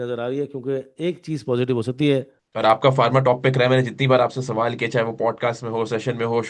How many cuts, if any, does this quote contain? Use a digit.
1